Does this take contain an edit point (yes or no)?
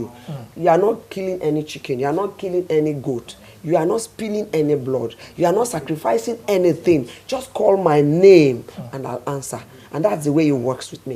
no